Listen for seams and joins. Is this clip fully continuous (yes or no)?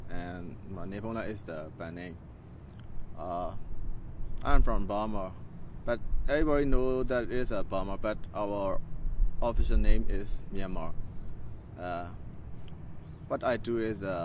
yes